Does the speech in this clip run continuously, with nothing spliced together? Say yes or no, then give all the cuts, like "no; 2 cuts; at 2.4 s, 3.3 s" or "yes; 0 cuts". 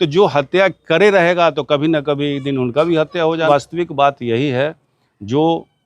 no; 1 cut; at 3.5 s